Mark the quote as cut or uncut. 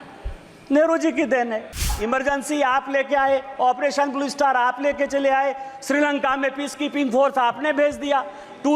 cut